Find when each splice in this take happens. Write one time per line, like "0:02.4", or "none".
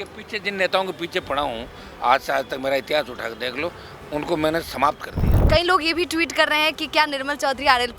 0:05.3